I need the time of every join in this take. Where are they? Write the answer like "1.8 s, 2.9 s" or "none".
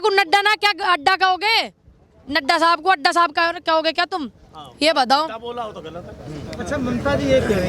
none